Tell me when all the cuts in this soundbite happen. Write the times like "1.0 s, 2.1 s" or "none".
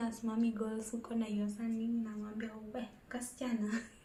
none